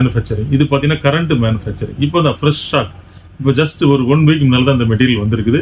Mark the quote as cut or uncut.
uncut